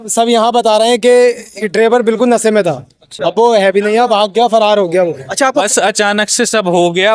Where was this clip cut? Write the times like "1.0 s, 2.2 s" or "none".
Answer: 5.6 s